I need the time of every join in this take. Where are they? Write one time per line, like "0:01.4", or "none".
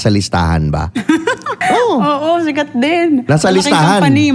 0:01.6